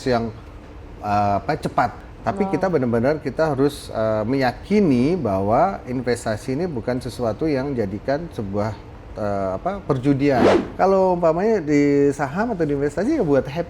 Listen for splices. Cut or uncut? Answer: cut